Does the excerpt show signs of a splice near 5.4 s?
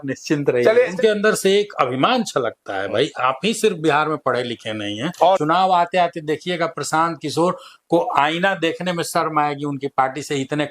yes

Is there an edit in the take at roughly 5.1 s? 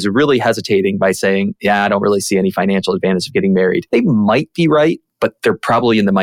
no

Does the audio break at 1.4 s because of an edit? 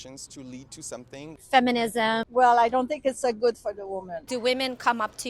yes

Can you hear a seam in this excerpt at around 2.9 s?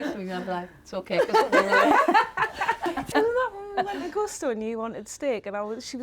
yes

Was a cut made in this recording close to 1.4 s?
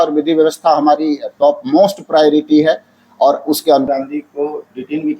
no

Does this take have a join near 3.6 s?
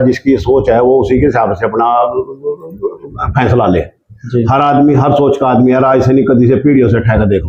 no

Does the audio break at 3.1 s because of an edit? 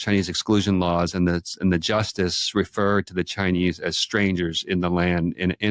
no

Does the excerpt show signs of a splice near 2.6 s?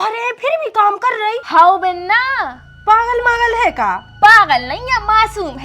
no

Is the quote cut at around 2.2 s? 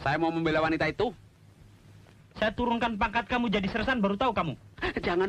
yes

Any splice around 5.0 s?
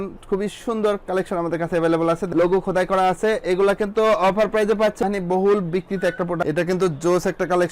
yes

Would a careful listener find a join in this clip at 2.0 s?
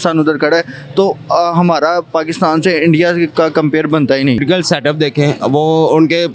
no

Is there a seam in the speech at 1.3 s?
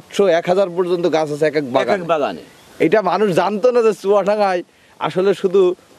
no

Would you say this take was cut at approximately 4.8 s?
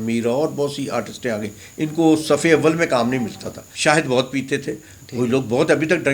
no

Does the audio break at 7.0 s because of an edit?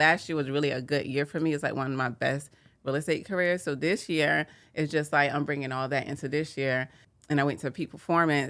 yes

